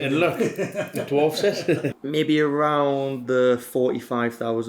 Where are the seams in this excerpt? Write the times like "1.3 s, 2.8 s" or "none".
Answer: 1.9 s